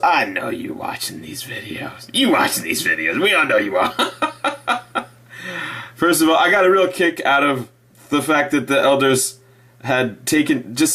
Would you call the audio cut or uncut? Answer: cut